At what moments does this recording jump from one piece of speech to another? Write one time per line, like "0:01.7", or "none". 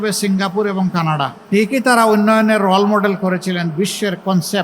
0:01.4